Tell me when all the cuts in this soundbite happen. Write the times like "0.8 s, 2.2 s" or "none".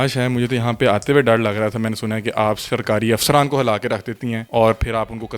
4.4 s